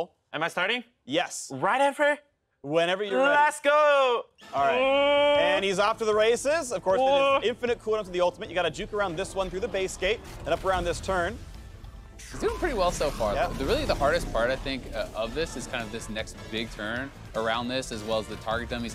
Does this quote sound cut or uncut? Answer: uncut